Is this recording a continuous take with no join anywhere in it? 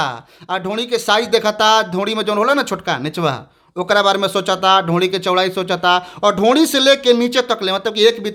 yes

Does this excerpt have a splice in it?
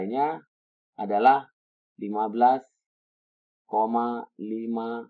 no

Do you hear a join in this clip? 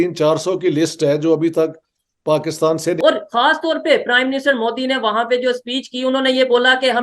yes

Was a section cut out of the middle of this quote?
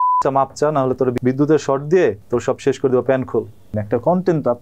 yes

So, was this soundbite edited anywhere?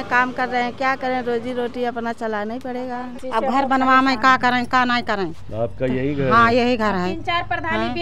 yes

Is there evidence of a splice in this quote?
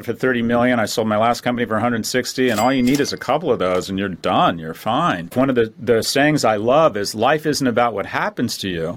yes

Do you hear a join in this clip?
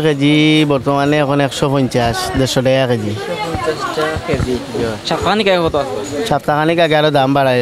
no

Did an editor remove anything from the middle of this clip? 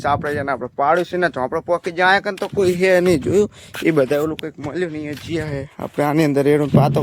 no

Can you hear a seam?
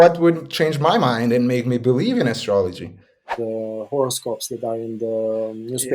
yes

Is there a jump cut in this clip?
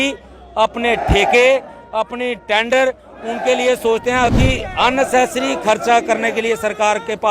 yes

